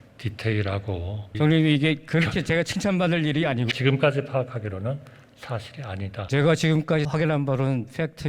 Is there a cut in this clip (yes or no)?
yes